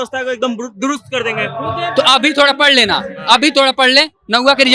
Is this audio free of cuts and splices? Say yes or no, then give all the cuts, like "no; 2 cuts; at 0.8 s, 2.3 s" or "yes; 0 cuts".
yes; 0 cuts